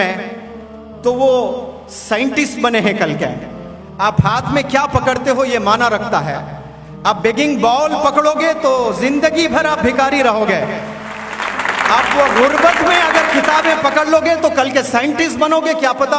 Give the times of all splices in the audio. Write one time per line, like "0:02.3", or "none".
none